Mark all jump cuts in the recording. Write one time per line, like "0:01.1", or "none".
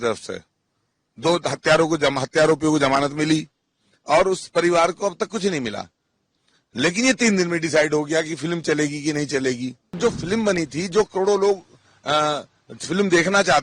0:10.0